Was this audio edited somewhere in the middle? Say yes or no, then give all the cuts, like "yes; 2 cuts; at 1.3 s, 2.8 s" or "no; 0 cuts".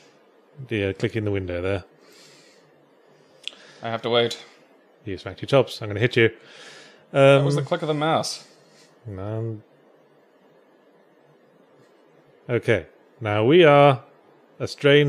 yes; 1 cut; at 5.8 s